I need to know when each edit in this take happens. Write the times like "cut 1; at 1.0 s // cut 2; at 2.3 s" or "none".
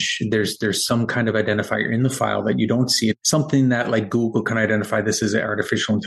cut 1; at 3.2 s